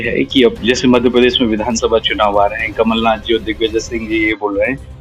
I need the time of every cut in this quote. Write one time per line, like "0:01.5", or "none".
none